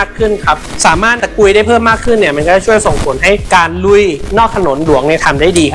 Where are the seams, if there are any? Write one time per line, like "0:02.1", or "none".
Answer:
none